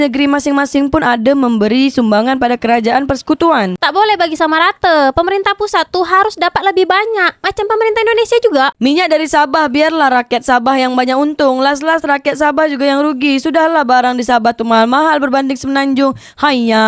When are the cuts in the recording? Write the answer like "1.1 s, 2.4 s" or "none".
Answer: 3.8 s, 8.8 s